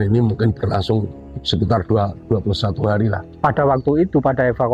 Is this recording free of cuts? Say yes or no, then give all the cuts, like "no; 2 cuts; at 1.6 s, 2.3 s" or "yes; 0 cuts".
no; 1 cut; at 3.2 s